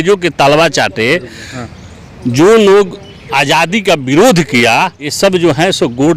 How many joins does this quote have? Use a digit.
1